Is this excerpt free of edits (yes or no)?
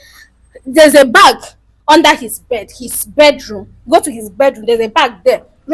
yes